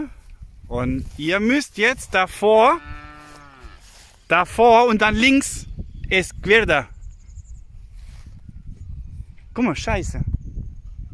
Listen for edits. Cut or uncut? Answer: uncut